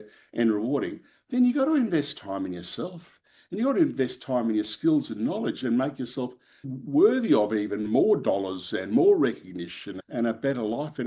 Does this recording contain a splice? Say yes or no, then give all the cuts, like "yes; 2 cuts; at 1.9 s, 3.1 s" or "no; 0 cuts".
yes; 1 cut; at 9.9 s